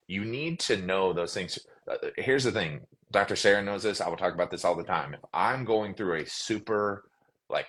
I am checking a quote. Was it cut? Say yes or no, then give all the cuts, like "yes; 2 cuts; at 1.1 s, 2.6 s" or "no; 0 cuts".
no; 0 cuts